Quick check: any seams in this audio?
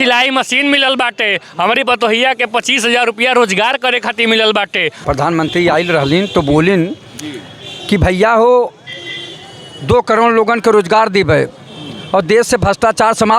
yes; 1 cut; at 4.9 s

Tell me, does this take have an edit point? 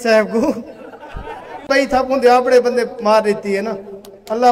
yes; 1 cut; at 1.7 s

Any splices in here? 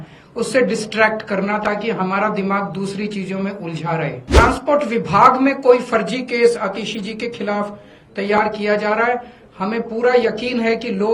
yes; 1 cut; at 4.4 s

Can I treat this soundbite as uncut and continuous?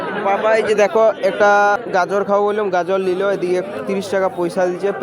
no; 1 cut; at 1.8 s

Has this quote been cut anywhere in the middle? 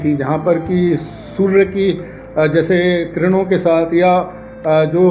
no; 0 cuts

